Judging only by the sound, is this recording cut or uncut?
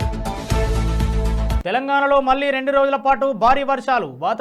cut